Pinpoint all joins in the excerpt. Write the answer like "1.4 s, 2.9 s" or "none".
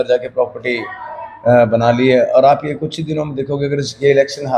none